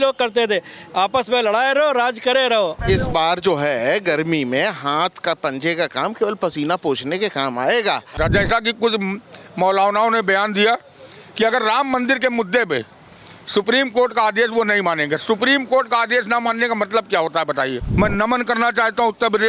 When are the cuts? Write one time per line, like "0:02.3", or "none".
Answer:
0:02.8
0:08.2
0:17.8